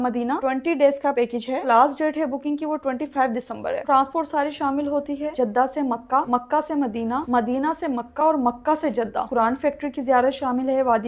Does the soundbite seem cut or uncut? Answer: cut